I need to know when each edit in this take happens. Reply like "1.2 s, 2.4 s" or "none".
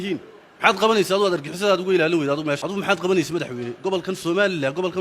2.6 s